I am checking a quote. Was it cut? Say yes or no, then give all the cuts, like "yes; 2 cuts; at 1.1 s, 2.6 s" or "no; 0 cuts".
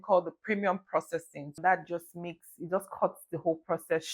no; 0 cuts